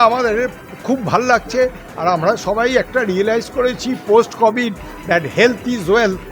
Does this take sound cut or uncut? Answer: uncut